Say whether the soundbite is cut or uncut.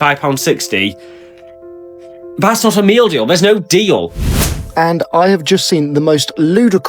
cut